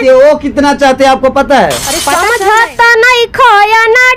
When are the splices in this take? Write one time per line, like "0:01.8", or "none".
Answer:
0:02.1